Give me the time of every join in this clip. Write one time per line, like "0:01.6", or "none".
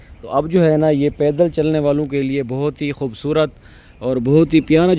none